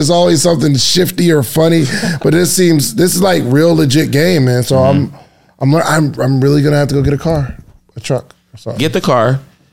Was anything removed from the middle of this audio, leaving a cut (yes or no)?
no